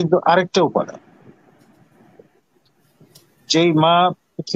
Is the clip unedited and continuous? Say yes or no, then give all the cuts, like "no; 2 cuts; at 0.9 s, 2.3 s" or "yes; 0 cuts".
yes; 0 cuts